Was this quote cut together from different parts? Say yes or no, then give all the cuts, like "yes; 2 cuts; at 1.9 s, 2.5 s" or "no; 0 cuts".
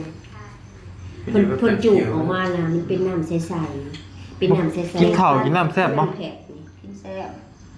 no; 0 cuts